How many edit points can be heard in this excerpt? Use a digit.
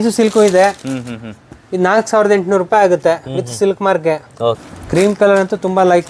1